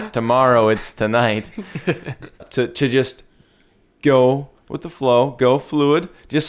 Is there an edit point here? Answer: yes; 1 cut; at 2.5 s

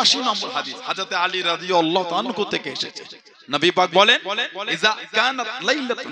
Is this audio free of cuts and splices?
yes; 0 cuts

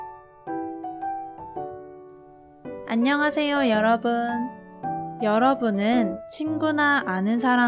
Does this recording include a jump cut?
yes; 1 cut; at 2.9 s

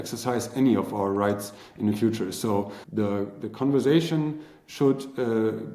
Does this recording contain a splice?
yes; 1 cut; at 2.8 s

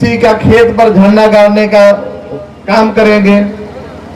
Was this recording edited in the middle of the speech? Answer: no; 0 cuts

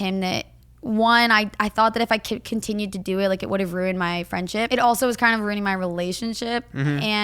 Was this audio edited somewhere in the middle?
yes; 1 cut; at 4.7 s

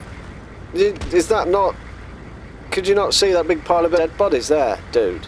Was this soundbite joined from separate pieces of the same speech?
yes; 1 cut; at 4.0 s

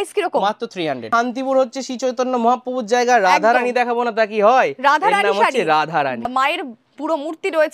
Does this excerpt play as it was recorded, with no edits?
no; 2 cuts; at 1.0 s, 6.3 s

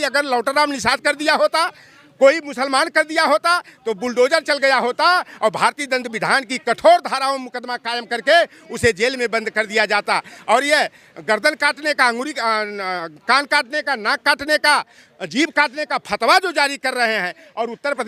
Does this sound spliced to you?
no; 0 cuts

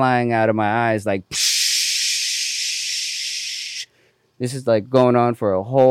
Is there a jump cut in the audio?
no; 0 cuts

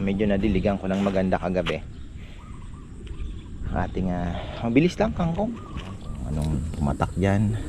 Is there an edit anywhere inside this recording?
yes; 1 cut; at 6.1 s

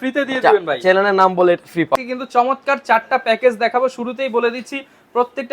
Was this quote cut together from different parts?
yes; 1 cut; at 1.9 s

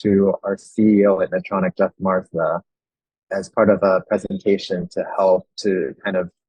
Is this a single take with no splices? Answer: yes; 0 cuts

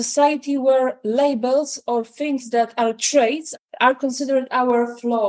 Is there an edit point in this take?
no; 0 cuts

